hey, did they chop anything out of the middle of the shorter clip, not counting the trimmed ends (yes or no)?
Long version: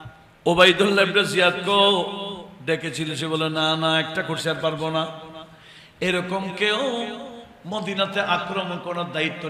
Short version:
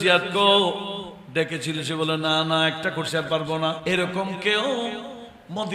yes